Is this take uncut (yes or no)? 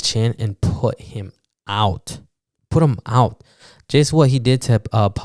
yes